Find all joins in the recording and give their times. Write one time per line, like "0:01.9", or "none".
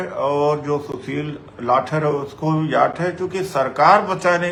none